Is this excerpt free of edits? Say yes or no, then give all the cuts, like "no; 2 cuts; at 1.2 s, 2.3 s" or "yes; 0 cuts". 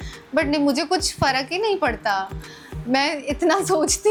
yes; 0 cuts